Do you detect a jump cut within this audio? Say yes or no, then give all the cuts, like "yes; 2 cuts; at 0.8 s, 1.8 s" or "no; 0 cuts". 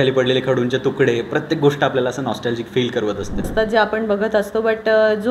yes; 1 cut; at 3.5 s